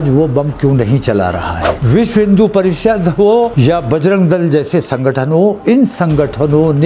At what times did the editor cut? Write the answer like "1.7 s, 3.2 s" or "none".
1.7 s, 3.5 s

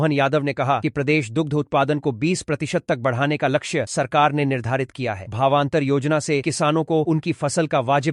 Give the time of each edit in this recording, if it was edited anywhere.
none

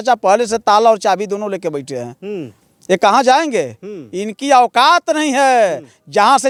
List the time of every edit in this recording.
none

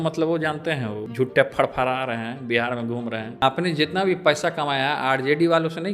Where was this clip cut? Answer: 1.0 s, 3.4 s

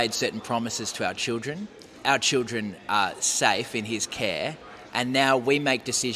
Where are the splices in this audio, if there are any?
2.0 s

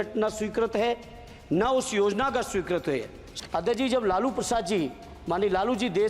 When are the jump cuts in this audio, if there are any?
3.3 s

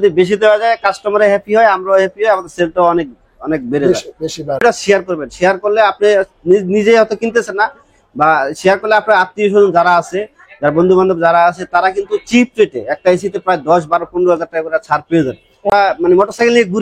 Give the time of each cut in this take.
4.6 s, 15.7 s

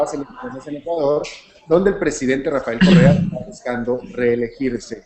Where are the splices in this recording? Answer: 0.9 s

